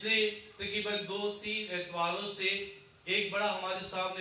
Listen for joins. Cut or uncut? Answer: uncut